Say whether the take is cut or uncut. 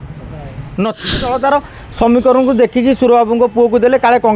cut